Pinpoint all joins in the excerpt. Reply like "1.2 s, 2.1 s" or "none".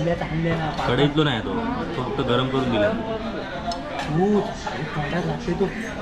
none